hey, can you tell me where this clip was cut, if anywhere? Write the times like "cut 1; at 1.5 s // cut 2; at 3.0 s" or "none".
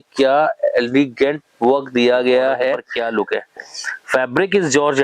cut 1; at 2.9 s